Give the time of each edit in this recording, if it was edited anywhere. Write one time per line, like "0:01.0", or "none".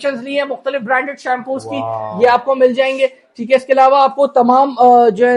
none